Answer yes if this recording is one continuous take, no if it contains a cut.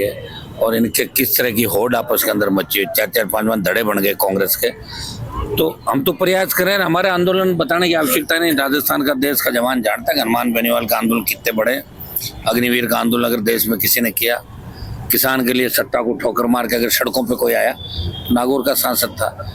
yes